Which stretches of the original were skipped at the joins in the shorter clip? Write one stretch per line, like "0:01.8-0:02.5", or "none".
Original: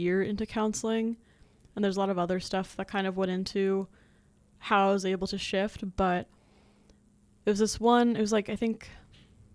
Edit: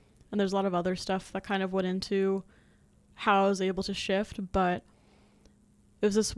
none